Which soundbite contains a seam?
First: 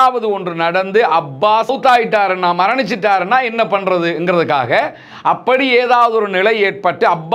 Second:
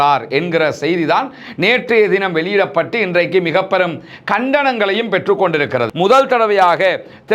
second; 1 cut; at 5.9 s

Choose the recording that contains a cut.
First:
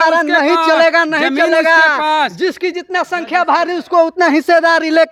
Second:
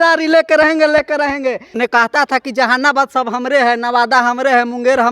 second; 1 cut; at 1.8 s

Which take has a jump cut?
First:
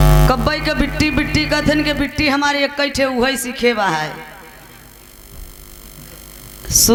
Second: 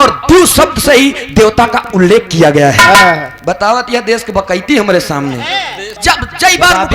second; 1 cut; at 5.9 s

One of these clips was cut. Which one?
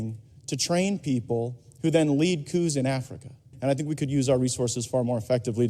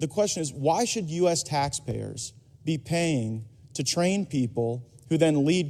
first; 1 cut; at 3.5 s

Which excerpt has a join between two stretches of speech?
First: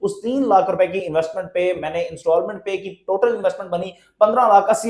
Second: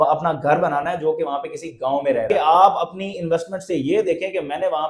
second; 1 cut; at 2.3 s

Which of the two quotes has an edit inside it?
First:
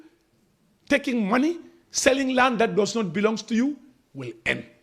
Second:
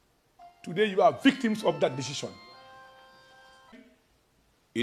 second; 1 cut; at 3.7 s

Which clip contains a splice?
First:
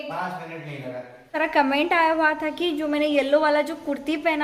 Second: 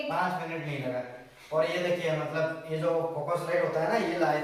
first; 1 cut; at 1.4 s

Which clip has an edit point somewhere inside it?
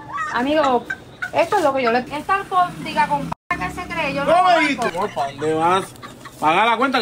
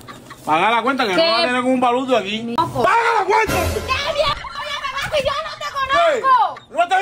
first; 2 cuts; at 2.0 s, 4.9 s

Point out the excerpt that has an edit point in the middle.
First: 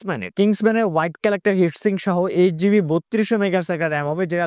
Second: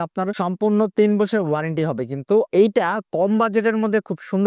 second; 1 cut; at 2.5 s

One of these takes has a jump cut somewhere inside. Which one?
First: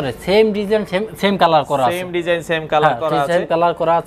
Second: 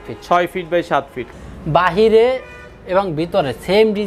second; 1 cut; at 1.3 s

